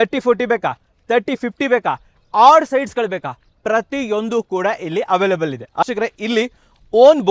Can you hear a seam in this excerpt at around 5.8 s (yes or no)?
yes